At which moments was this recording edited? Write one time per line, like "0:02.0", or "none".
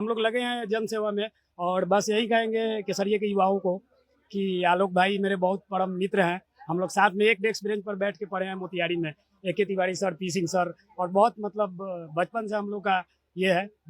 none